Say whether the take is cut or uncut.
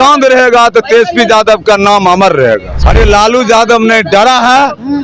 cut